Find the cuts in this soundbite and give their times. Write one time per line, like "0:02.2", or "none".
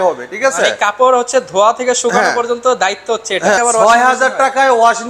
0:03.6

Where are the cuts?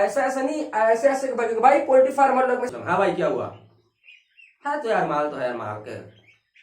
0:02.7

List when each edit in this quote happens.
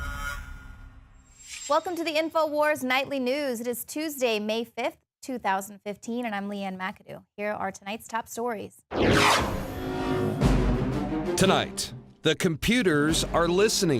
0:01.4

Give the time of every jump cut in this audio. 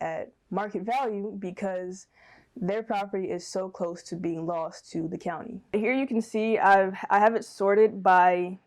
0:05.7

